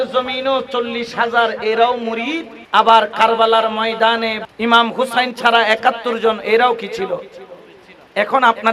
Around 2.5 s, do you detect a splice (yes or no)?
yes